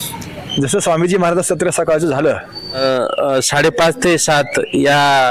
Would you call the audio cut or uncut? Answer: cut